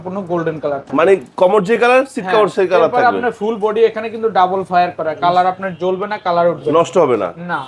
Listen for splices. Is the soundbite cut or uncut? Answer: uncut